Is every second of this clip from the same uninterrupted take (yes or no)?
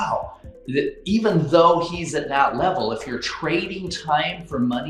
yes